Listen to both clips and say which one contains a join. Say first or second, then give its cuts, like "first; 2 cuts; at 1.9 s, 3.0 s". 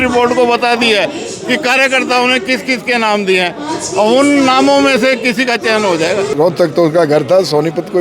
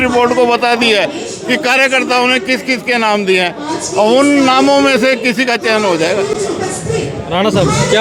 first; 1 cut; at 6.5 s